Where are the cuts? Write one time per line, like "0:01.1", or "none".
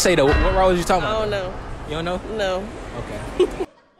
none

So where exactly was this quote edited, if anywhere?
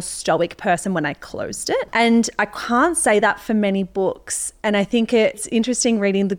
0:01.9
0:05.4

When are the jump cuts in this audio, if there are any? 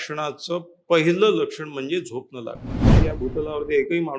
0:03.0

